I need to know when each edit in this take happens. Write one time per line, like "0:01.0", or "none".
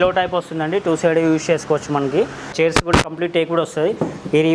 0:02.5